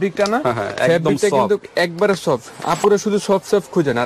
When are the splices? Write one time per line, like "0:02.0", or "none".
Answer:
none